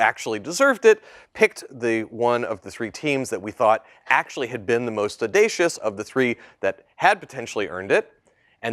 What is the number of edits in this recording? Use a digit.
1